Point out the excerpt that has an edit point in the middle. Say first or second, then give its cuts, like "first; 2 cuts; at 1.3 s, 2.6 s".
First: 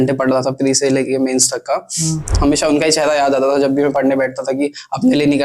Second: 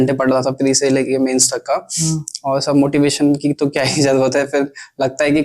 first; 1 cut; at 2.3 s